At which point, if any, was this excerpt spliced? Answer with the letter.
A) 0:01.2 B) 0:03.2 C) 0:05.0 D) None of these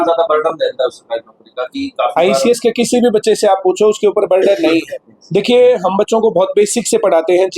C